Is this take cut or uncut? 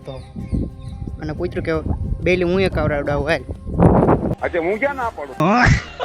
uncut